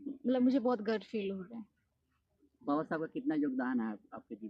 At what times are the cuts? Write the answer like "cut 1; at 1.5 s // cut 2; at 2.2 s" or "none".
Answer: none